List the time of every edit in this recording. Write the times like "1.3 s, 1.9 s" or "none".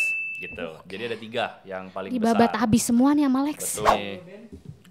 3.9 s